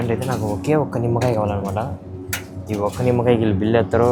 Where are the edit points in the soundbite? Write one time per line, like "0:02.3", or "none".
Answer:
none